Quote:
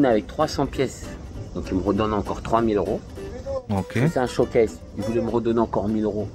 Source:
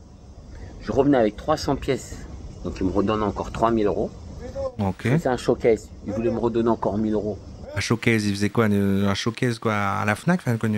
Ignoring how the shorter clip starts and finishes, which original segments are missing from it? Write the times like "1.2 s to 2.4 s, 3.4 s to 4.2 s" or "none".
none

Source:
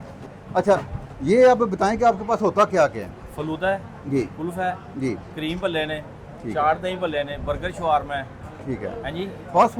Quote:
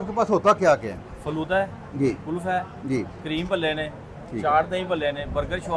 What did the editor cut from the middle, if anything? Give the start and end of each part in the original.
none

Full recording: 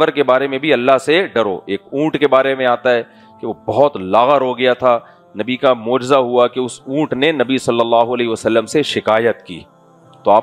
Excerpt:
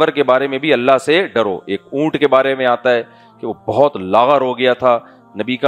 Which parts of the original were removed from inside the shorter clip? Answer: none

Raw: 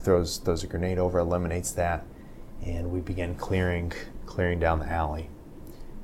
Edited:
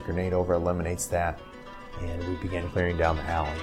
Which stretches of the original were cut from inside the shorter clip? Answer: 3.3 s to 4.3 s

